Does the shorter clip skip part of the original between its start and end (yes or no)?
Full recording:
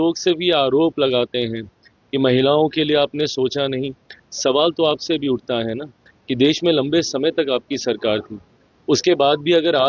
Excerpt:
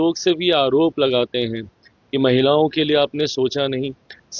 no